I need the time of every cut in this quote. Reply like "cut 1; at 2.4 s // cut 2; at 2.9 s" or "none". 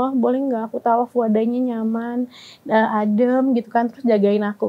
none